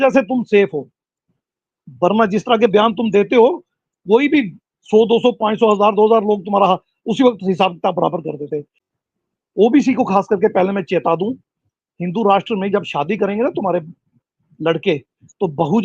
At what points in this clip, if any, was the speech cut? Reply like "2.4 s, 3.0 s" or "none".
8.8 s